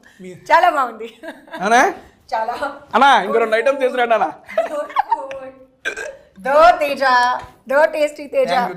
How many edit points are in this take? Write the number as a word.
zero